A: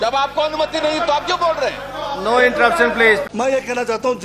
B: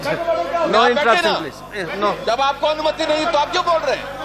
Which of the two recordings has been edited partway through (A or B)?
A